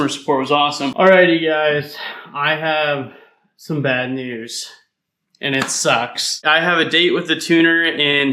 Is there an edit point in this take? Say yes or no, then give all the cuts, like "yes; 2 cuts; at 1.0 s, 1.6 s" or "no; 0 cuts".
yes; 2 cuts; at 0.9 s, 6.4 s